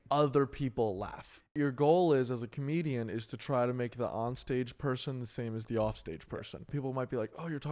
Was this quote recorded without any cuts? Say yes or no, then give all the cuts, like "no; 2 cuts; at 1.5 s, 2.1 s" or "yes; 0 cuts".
no; 2 cuts; at 1.5 s, 6.7 s